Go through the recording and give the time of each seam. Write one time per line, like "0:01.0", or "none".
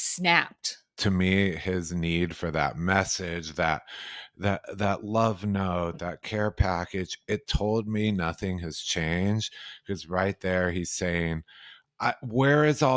0:00.9